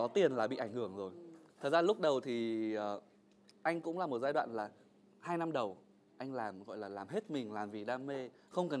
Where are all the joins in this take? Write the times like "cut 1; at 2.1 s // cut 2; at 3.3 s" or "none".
none